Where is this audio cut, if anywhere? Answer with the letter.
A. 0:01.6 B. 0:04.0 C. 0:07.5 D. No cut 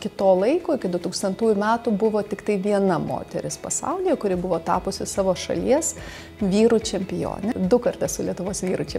C